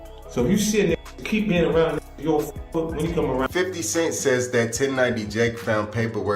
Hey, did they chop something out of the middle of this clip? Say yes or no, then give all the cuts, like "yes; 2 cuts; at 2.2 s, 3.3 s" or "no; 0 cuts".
yes; 1 cut; at 3.4 s